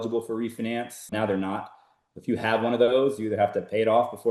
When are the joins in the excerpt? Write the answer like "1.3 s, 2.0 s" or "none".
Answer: 1.1 s